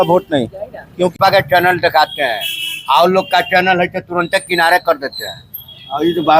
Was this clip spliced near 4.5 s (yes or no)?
no